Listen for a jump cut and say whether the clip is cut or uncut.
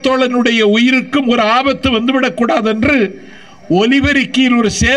uncut